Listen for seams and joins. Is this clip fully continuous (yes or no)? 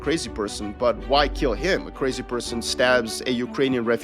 yes